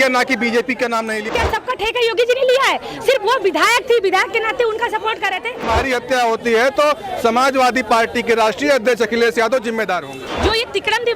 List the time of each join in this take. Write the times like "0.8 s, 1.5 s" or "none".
1.3 s, 5.7 s, 10.2 s